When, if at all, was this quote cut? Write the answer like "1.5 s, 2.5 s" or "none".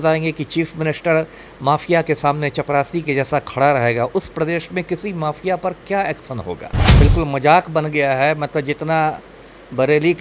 6.9 s